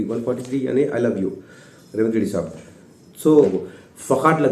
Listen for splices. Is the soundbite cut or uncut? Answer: cut